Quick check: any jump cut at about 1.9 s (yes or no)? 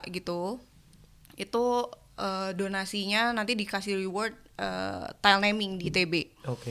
no